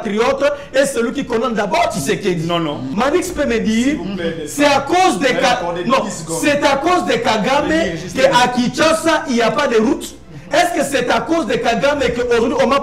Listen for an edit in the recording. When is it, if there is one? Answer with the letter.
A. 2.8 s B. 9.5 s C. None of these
A